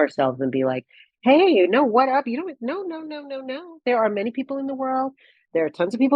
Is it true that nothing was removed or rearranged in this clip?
yes; 0 cuts

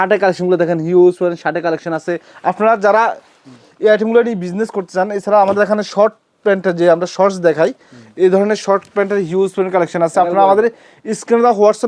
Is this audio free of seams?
yes; 0 cuts

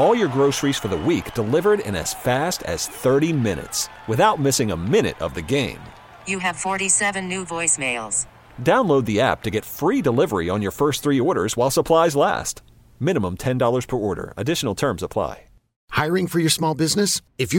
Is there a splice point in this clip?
yes; 1 cut; at 15.8 s

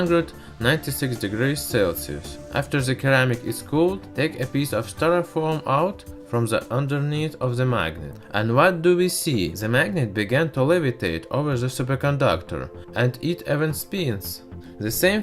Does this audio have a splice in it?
yes; 1 cut; at 5.3 s

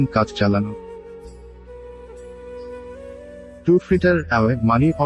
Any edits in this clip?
no; 0 cuts

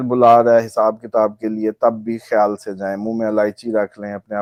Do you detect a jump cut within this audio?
no; 0 cuts

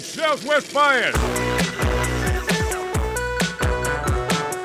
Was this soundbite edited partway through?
no; 0 cuts

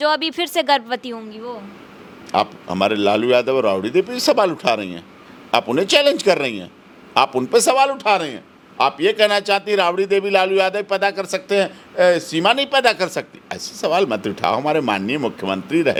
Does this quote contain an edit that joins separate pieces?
no; 0 cuts

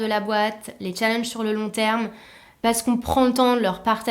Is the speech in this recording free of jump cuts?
no; 1 cut; at 2.6 s

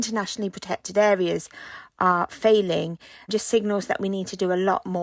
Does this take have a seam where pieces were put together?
yes; 1 cut; at 3.3 s

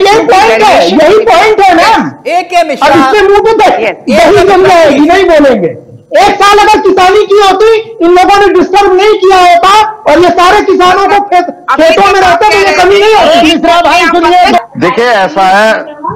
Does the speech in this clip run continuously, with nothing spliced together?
no; 1 cut; at 14.6 s

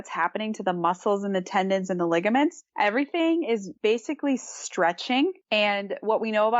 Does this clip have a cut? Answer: yes; 3 cuts; at 2.6 s, 3.7 s, 5.4 s

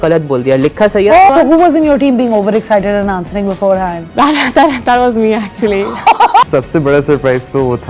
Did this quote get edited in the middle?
yes; 2 cuts; at 1.3 s, 6.4 s

